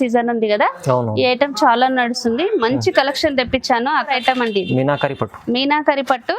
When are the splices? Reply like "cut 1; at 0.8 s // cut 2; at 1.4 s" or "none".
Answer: cut 1; at 4.1 s